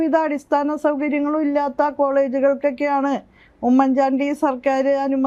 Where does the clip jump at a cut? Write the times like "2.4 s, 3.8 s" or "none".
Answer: none